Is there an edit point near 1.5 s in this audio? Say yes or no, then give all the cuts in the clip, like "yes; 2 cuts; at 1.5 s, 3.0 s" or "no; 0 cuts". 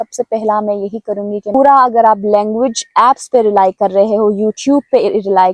yes; 1 cut; at 1.5 s